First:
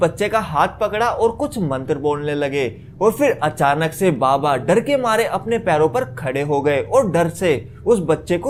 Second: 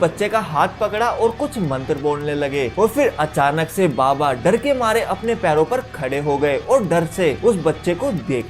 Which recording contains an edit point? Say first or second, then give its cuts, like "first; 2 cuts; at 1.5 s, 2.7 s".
second; 2 cuts; at 2.7 s, 7.4 s